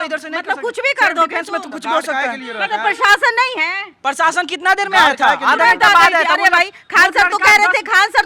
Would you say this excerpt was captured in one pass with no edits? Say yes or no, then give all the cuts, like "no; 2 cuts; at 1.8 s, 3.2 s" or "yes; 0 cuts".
yes; 0 cuts